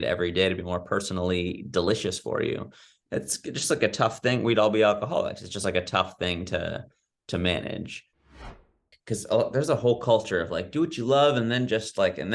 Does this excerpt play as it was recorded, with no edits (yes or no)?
no